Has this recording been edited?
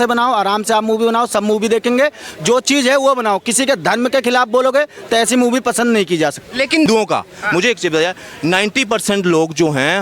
yes; 1 cut; at 6.9 s

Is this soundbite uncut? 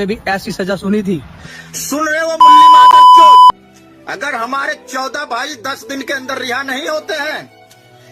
no; 1 cut; at 1.4 s

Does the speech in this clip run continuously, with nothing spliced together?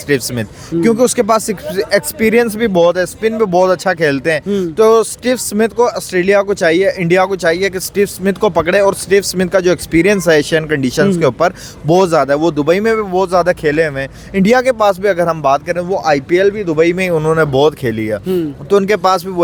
yes; 0 cuts

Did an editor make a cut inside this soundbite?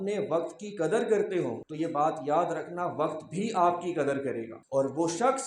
yes; 2 cuts; at 1.6 s, 4.6 s

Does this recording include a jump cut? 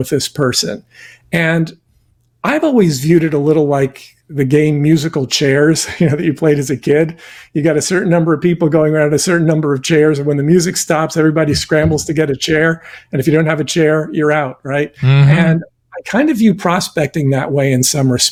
no; 0 cuts

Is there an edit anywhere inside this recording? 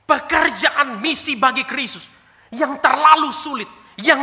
no; 0 cuts

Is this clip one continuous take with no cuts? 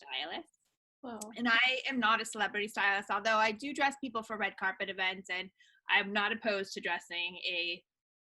yes; 0 cuts

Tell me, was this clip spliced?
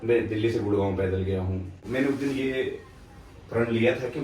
yes; 1 cut; at 1.8 s

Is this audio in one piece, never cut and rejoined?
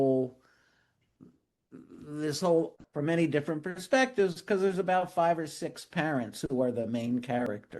no; 1 cut; at 2.8 s

